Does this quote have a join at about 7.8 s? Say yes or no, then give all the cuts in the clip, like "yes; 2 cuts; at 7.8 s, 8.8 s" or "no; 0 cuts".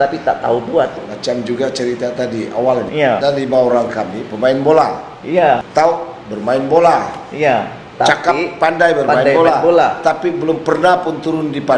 no; 3 cuts; at 1.1 s, 3.0 s, 5.7 s